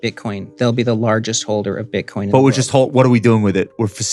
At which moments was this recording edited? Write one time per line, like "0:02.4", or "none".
none